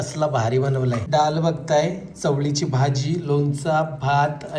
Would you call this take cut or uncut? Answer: cut